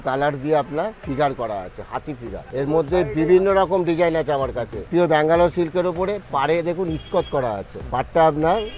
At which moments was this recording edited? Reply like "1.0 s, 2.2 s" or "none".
2.4 s, 4.8 s, 7.7 s